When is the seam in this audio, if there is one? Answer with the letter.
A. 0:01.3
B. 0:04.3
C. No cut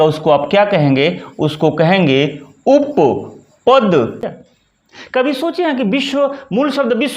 B